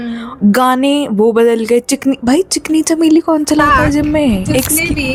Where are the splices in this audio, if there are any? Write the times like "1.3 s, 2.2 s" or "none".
none